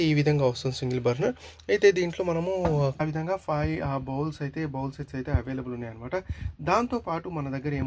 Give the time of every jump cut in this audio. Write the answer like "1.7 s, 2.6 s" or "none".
3.0 s